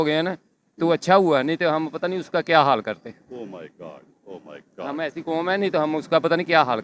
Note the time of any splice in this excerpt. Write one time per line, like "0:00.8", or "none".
none